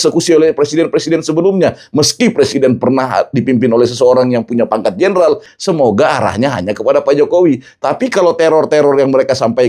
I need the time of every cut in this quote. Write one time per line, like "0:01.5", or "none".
0:05.5